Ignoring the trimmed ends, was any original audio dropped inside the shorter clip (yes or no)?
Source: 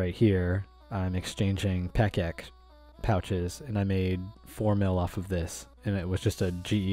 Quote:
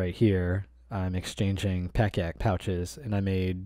yes